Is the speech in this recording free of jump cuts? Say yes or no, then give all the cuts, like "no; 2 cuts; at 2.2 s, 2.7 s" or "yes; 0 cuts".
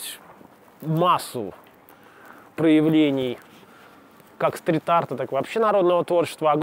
yes; 0 cuts